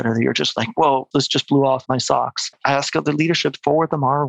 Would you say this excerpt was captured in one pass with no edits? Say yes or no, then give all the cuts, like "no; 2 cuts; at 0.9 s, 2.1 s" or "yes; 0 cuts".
no; 2 cuts; at 1.1 s, 2.2 s